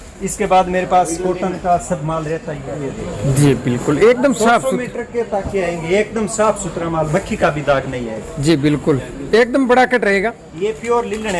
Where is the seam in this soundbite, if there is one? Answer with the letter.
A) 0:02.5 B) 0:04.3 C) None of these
A